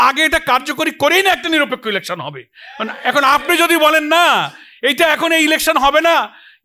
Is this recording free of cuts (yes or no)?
yes